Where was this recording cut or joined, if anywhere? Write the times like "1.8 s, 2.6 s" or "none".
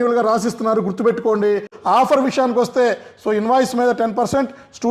1.7 s